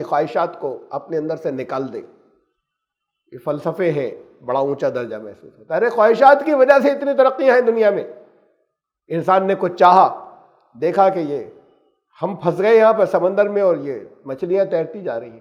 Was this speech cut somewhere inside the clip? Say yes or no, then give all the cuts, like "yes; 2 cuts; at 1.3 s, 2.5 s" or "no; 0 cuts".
no; 0 cuts